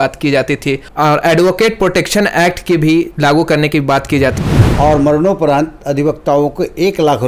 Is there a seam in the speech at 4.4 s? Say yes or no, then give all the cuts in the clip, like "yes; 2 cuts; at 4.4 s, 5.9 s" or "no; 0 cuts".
yes; 1 cut; at 4.4 s